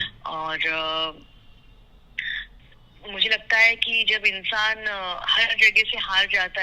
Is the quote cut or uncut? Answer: uncut